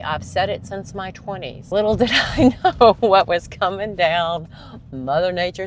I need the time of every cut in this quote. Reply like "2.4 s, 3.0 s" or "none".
1.5 s